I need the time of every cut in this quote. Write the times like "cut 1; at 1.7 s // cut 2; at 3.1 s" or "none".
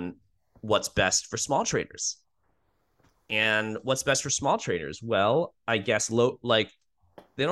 none